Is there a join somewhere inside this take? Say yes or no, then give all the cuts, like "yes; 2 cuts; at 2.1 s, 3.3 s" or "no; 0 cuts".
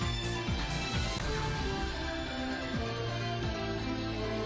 yes; 1 cut; at 1.1 s